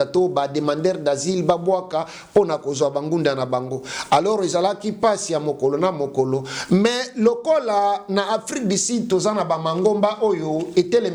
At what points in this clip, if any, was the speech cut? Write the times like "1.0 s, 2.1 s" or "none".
none